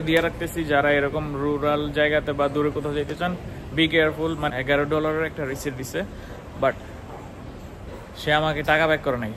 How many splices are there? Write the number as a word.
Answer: one